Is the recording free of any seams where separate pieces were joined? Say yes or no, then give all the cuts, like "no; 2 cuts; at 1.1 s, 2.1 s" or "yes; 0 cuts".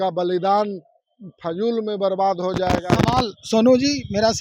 yes; 0 cuts